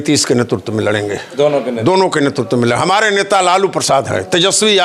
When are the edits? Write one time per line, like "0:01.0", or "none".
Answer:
none